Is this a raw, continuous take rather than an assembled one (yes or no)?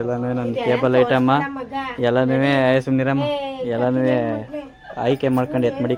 yes